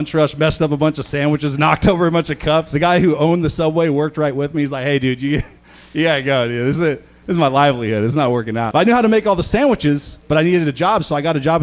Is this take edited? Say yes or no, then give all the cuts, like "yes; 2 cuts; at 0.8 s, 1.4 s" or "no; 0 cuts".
yes; 2 cuts; at 2.7 s, 8.7 s